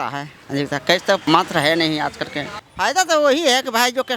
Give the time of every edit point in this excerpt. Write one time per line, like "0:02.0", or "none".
0:01.2
0:02.5